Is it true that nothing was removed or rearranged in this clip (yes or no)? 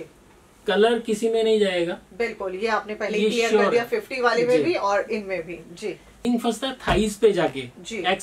no